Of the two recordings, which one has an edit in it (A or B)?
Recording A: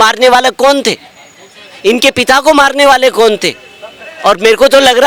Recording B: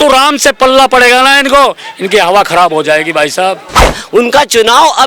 B